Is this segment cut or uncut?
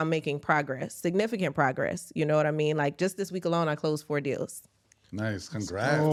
uncut